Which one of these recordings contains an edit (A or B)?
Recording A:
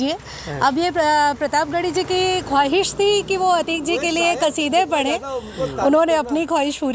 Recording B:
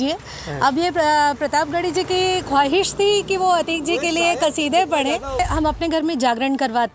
B